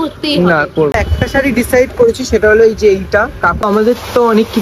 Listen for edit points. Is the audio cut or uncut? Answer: cut